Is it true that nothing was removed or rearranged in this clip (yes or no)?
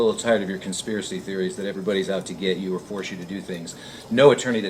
yes